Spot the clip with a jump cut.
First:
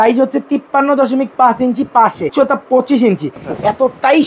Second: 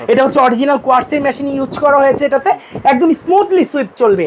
first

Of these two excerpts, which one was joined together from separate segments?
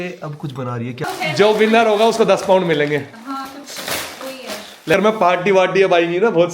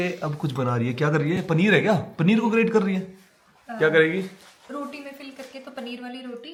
first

